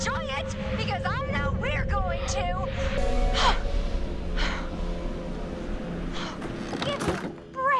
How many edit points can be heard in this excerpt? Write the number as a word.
one